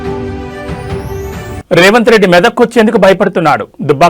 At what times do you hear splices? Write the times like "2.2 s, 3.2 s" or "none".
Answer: none